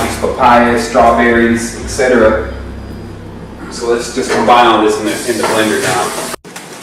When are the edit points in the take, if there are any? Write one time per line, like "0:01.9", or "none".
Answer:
0:03.0